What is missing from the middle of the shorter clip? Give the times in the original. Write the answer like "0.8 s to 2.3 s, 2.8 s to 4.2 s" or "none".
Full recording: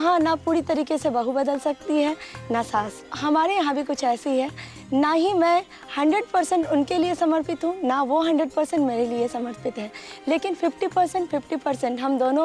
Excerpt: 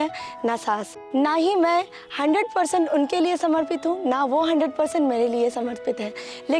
3.0 s to 4.7 s